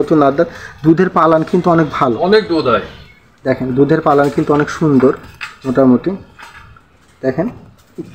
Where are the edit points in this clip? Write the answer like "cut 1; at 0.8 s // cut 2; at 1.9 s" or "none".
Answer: none